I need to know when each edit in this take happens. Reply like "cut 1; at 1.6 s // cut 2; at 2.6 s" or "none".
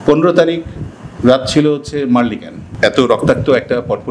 cut 1; at 2.7 s